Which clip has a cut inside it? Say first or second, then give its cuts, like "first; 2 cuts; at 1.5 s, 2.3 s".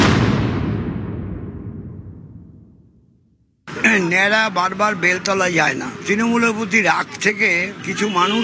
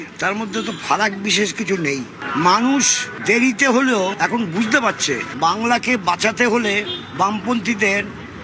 first; 1 cut; at 3.7 s